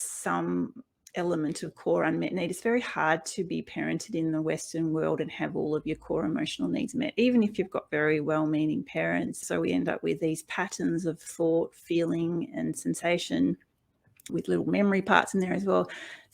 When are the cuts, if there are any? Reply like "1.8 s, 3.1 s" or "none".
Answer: 9.4 s, 14.3 s